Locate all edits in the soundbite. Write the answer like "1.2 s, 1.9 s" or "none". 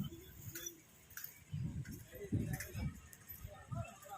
none

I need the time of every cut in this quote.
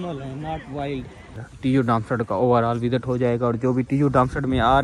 1.4 s

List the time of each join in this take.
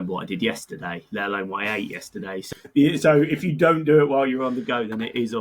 2.5 s

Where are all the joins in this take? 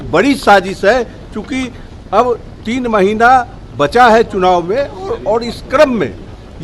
none

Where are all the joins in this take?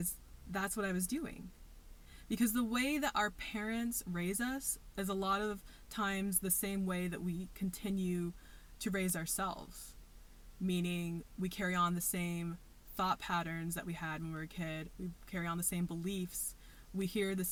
none

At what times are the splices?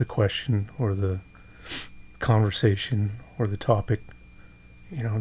none

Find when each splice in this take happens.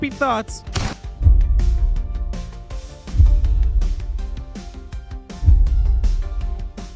none

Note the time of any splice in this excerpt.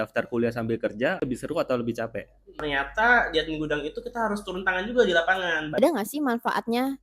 2.5 s, 5.8 s

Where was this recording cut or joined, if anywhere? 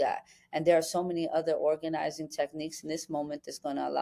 none

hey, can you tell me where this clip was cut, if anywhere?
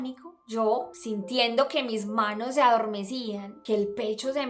1.0 s, 3.5 s

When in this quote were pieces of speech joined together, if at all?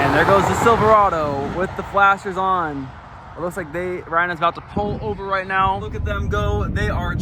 5.8 s

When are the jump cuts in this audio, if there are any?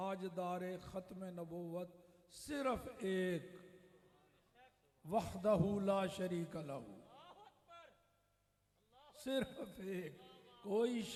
none

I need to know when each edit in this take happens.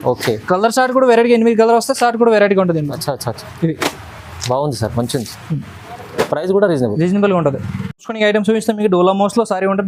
none

